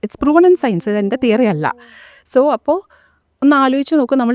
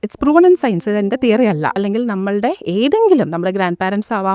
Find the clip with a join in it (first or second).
second